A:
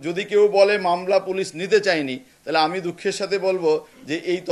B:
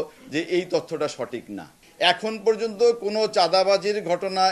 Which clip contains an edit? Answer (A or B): B